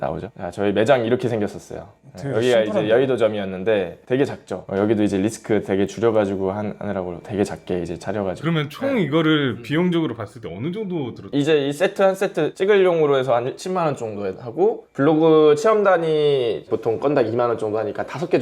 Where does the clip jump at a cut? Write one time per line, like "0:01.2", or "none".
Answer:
0:04.6
0:08.4